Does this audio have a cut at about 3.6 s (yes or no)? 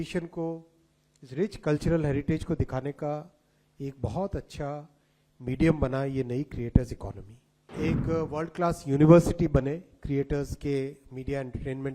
no